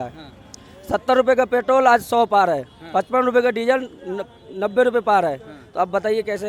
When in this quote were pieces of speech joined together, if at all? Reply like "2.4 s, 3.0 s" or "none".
none